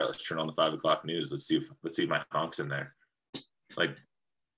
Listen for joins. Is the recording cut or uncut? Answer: cut